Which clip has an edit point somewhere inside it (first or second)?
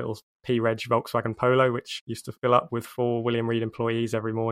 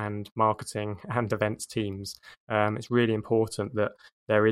first